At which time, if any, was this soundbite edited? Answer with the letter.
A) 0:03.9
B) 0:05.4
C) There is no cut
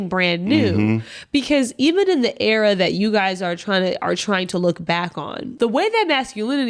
B